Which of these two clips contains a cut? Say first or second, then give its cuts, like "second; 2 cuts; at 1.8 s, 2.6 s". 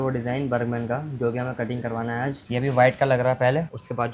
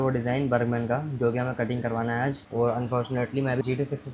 first; 1 cut; at 2.5 s